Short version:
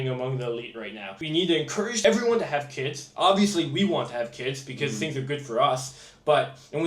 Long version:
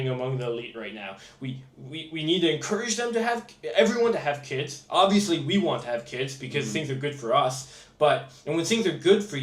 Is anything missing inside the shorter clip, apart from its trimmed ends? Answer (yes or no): yes